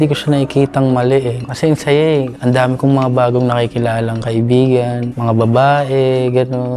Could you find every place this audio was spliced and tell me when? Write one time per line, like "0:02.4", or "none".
0:01.4
0:02.3
0:05.1